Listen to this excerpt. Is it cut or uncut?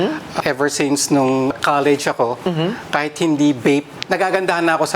cut